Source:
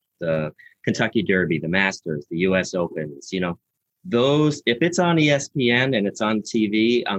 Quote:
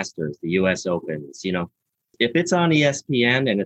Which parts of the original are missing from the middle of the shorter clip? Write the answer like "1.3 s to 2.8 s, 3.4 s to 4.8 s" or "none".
4.0 s to 4.6 s